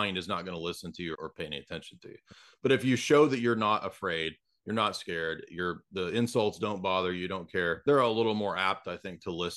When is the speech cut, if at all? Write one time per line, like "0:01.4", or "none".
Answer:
0:01.1
0:07.8

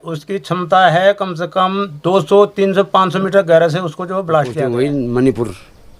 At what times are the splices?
0:04.7

